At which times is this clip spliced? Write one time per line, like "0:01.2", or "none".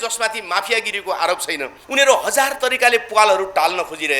0:01.8